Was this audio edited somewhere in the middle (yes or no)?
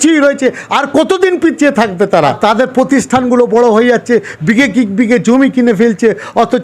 yes